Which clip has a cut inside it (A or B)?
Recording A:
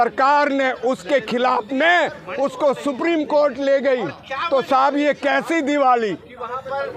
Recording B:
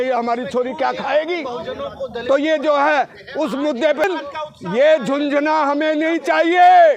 B